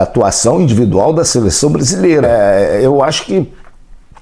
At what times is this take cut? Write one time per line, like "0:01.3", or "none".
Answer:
0:02.3